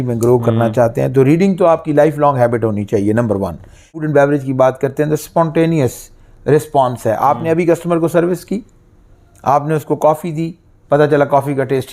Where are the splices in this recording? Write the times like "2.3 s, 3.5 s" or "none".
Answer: 4.0 s